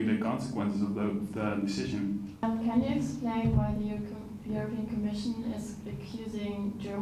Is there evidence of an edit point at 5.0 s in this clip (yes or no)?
no